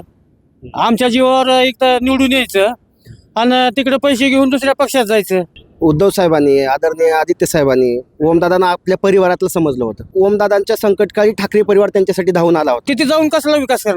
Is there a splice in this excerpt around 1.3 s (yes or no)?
no